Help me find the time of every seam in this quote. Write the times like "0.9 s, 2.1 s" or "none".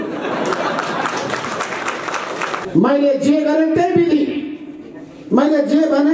2.6 s